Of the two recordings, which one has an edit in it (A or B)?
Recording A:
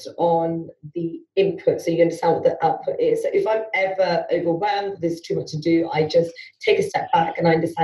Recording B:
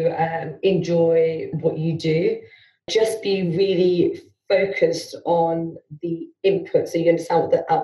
B